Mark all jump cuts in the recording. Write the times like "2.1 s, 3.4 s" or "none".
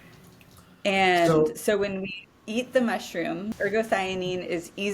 3.5 s